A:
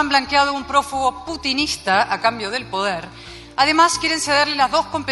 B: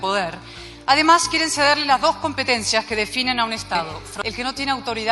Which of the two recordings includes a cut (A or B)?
B